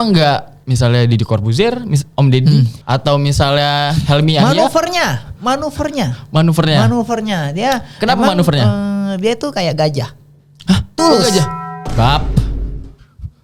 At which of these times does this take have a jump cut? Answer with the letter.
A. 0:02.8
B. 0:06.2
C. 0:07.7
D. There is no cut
D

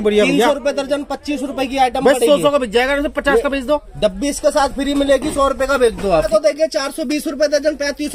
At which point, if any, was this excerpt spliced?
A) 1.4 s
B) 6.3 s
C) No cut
B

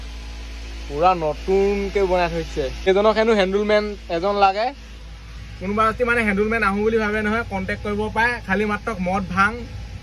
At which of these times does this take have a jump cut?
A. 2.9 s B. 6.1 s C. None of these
A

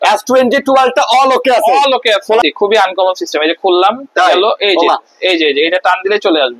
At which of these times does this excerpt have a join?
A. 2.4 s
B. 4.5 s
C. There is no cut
A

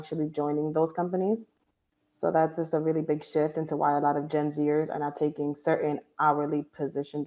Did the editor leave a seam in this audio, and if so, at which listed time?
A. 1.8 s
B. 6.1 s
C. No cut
C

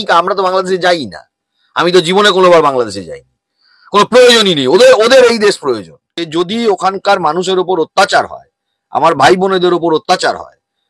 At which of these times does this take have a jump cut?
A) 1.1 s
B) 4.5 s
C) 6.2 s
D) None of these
C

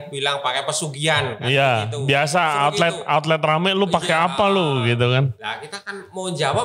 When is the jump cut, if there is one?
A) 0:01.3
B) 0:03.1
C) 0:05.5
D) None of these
D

